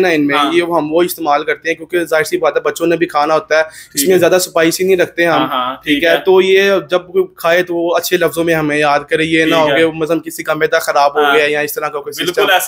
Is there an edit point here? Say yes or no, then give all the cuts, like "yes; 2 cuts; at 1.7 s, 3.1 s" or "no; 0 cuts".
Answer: no; 0 cuts